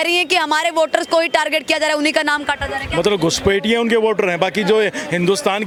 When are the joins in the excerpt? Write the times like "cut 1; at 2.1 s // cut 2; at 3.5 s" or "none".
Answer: none